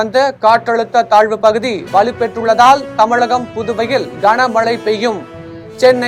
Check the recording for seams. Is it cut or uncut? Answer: uncut